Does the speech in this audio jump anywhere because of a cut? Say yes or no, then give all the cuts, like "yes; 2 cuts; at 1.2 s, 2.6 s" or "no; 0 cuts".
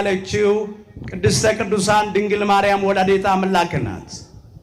no; 0 cuts